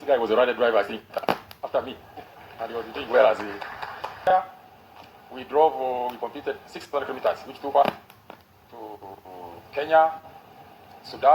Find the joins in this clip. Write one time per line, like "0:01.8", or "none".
0:04.2